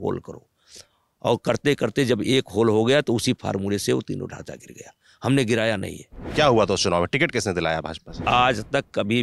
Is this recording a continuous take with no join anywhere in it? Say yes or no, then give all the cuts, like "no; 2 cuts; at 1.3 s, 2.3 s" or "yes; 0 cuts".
no; 2 cuts; at 6.1 s, 8.1 s